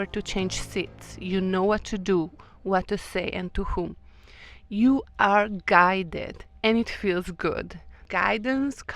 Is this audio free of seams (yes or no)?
no